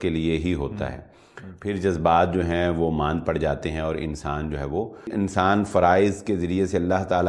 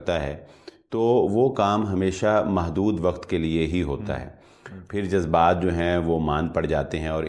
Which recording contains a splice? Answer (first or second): first